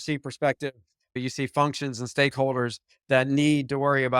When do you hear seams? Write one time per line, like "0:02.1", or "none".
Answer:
0:01.2